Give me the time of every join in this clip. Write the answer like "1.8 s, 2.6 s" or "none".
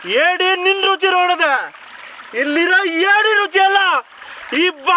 none